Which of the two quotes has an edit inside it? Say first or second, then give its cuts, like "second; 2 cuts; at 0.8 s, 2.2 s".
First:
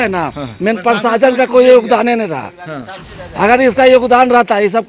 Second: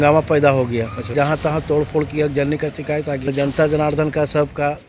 second; 2 cuts; at 1.1 s, 3.3 s